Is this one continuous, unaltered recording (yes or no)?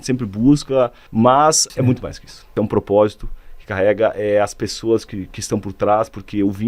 no